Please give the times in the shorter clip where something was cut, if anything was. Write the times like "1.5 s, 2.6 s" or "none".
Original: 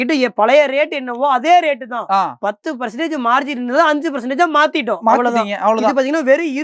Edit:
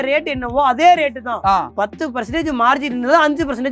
none